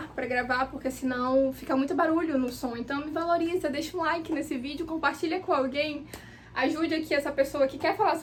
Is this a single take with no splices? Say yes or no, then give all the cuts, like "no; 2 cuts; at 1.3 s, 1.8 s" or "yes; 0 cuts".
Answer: yes; 0 cuts